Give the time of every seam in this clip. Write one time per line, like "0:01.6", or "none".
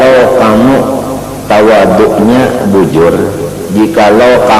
none

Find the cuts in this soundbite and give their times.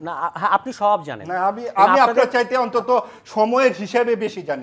none

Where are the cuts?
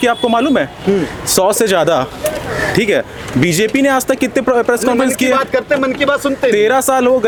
none

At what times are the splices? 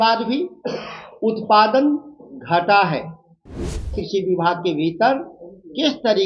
0:03.9

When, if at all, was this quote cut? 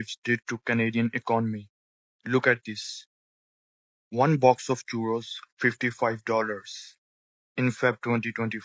none

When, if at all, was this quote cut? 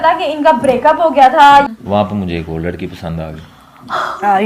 0:01.7

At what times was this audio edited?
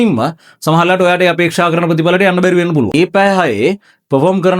0:02.9

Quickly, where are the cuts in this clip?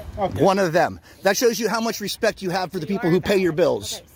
none

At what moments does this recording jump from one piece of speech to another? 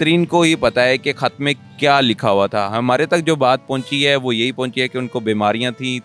none

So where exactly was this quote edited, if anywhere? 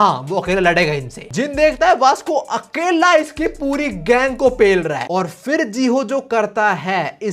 0:01.2
0:05.0

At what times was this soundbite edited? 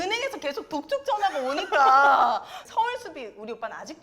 0:02.6

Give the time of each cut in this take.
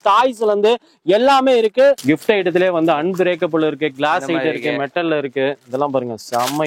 0:02.0

